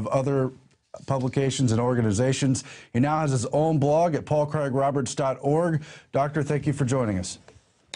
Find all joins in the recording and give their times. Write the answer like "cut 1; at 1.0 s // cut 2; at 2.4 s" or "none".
cut 1; at 2.7 s